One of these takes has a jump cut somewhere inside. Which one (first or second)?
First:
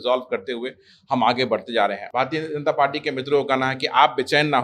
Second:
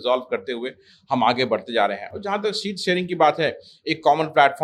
first